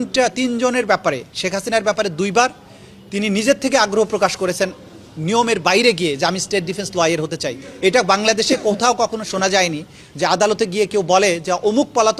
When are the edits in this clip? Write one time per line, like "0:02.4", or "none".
none